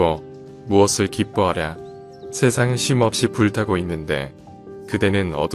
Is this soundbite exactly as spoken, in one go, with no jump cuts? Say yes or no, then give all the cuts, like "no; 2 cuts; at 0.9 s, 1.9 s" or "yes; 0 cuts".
yes; 0 cuts